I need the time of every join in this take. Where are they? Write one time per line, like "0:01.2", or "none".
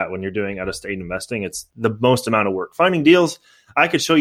none